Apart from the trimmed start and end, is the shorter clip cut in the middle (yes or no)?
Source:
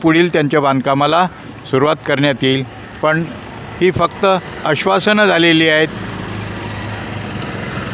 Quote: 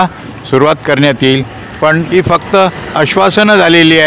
yes